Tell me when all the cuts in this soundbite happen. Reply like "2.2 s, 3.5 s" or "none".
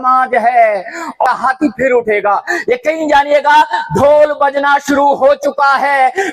1.2 s